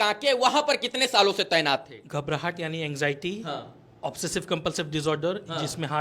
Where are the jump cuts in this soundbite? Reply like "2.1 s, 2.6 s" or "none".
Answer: 2.0 s